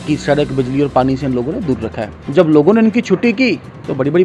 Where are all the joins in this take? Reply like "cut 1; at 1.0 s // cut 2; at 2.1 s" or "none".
cut 1; at 2.1 s